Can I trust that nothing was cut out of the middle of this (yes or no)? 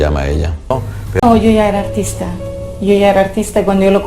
no